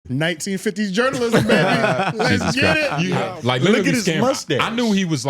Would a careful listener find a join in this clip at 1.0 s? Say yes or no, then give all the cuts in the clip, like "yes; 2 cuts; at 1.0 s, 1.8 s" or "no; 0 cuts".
no; 1 cut; at 3.2 s